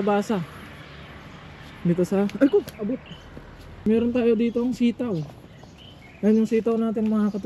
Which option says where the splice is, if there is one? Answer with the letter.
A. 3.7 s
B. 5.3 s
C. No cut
A